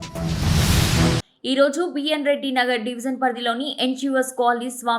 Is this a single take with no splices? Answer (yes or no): no